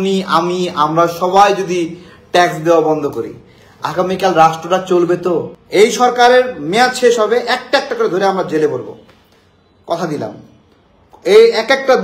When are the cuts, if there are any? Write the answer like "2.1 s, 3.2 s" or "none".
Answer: 5.6 s